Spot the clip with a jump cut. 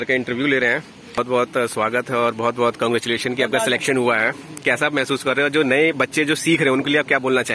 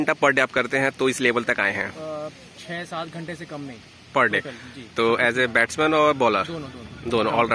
first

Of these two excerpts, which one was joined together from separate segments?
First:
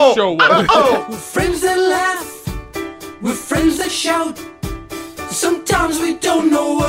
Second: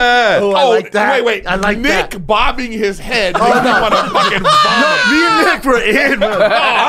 first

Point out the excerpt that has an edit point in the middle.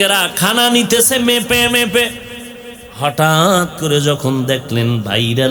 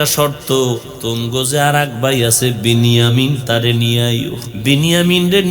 second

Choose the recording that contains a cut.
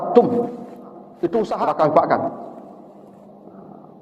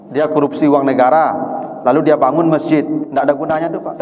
first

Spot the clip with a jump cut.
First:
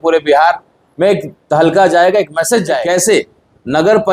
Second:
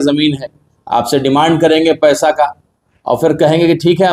first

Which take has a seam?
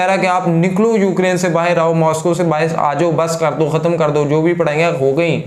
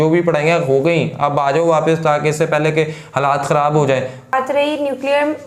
second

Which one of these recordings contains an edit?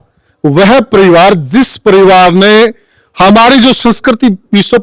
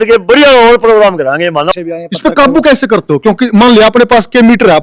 second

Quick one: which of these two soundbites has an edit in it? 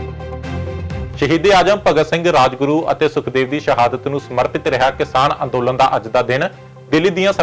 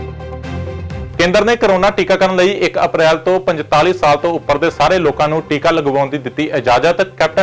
first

